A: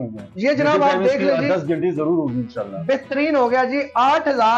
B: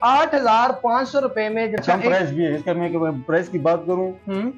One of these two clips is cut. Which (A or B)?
B